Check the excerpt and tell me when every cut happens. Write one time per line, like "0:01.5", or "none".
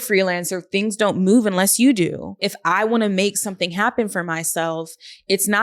0:02.5